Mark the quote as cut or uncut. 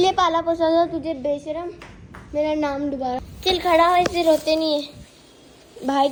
uncut